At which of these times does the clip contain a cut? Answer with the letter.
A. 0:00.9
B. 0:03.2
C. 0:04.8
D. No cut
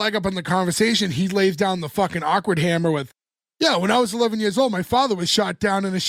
D